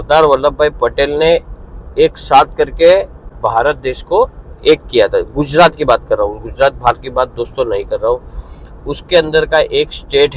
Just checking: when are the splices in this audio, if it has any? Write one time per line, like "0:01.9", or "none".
0:03.2